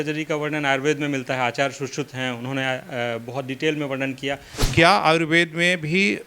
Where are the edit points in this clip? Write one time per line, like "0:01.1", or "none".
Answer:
0:04.7

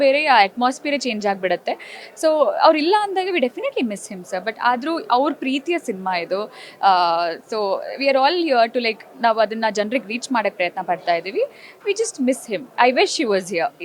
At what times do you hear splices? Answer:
none

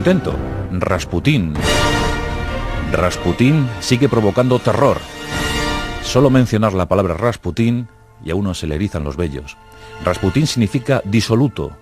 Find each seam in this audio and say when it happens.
0:07.2

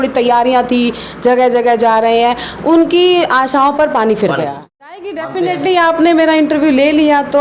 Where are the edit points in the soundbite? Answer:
0:04.6

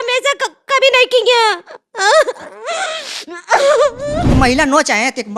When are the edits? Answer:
0:04.3

